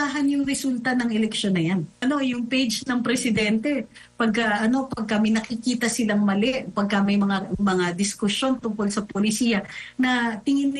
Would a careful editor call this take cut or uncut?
cut